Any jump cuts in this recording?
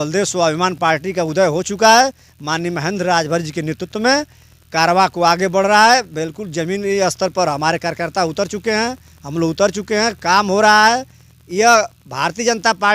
no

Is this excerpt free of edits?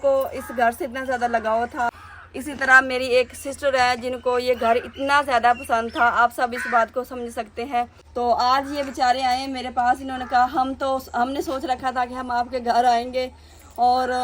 no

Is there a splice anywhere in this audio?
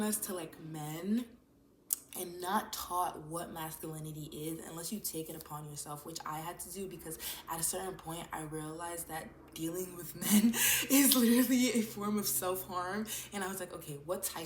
no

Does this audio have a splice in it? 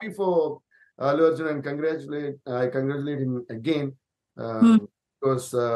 no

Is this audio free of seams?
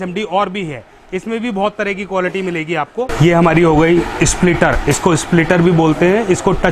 no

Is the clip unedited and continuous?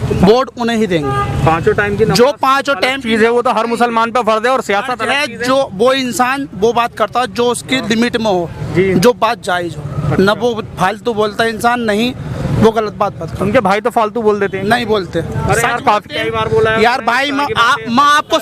yes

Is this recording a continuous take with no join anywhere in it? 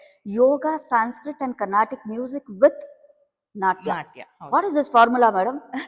yes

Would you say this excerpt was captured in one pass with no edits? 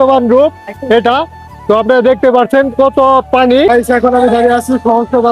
no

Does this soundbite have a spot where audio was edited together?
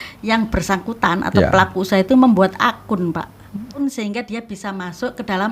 yes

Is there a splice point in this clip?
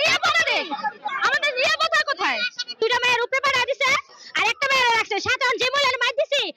yes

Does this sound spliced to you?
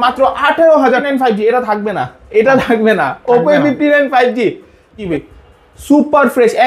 yes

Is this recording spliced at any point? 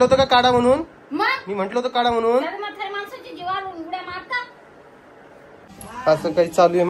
yes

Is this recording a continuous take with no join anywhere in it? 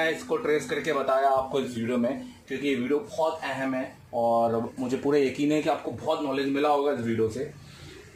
yes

